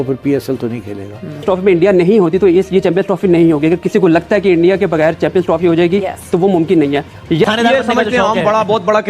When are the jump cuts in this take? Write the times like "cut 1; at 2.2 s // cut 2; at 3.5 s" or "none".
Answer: cut 1; at 1.4 s // cut 2; at 7.5 s